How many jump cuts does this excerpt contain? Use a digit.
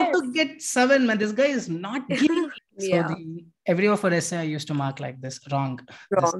1